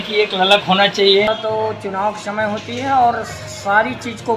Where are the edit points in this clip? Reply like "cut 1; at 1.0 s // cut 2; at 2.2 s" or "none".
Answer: cut 1; at 1.3 s

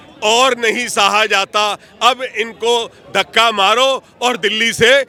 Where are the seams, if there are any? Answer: none

